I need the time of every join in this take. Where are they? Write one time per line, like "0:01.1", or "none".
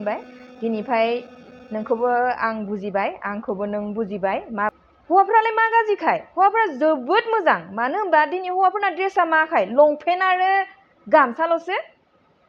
0:04.7